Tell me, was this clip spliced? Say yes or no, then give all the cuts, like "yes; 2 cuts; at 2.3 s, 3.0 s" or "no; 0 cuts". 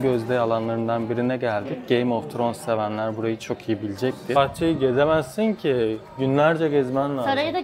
yes; 1 cut; at 4.4 s